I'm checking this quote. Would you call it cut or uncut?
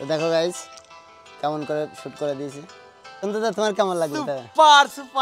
cut